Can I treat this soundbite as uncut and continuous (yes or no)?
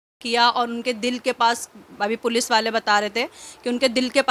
yes